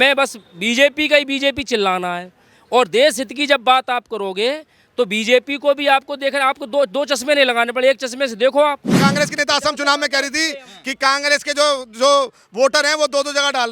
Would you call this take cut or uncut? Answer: cut